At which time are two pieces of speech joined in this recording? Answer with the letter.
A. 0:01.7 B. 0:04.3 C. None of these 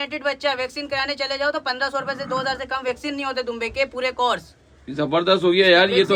C